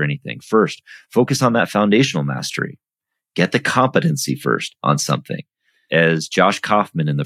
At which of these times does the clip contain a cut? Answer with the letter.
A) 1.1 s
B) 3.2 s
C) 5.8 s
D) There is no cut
C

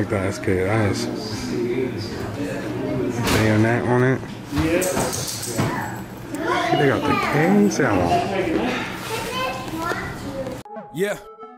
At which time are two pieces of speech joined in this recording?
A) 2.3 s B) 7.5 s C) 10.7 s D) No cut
C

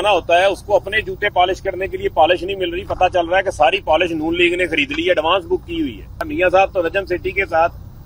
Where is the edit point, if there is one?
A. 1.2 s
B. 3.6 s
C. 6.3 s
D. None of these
C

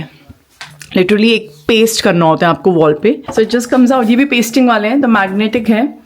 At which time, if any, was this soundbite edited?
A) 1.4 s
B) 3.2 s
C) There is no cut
B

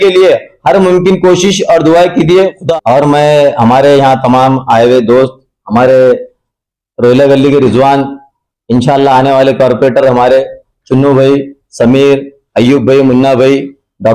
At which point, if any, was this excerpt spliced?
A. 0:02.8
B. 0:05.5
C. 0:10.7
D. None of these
D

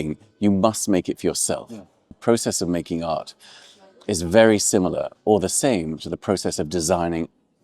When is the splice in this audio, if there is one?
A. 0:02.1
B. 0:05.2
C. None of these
A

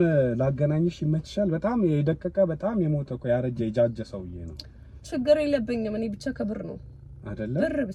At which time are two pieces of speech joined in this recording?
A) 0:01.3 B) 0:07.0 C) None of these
C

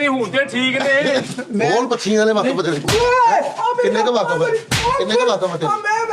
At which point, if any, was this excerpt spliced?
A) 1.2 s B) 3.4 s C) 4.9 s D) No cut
A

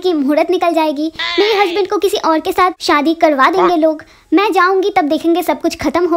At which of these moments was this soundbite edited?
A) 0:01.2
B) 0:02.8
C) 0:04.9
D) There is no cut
B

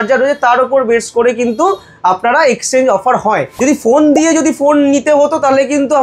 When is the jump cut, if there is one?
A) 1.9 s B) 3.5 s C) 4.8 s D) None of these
B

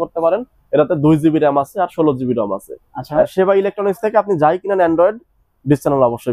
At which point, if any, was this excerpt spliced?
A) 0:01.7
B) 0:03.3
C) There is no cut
B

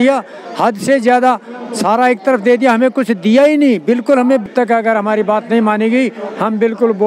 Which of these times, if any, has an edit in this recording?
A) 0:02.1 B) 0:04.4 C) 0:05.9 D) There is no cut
B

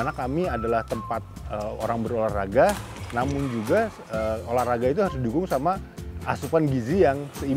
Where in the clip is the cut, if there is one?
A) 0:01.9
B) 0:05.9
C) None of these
C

